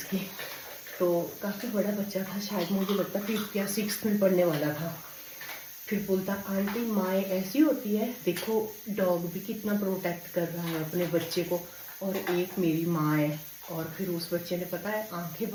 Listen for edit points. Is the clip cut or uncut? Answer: uncut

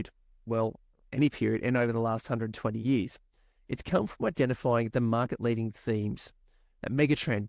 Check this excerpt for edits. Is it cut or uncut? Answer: uncut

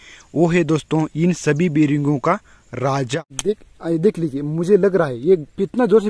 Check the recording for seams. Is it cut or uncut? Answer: cut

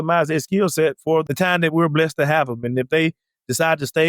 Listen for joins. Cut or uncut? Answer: cut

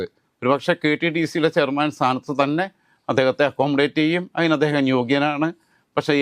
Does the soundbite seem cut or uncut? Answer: uncut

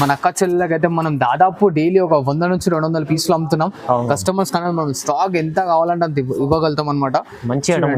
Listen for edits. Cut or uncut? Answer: uncut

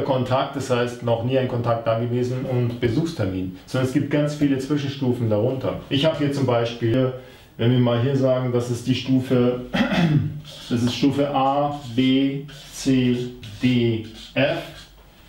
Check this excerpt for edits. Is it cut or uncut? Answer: cut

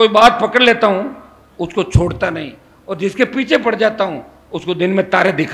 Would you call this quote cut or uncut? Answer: uncut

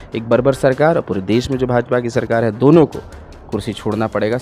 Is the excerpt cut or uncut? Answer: uncut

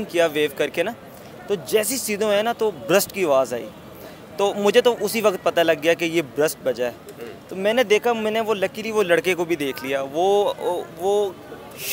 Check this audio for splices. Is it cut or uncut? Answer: uncut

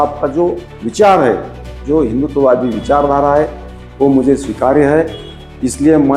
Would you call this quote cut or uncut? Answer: uncut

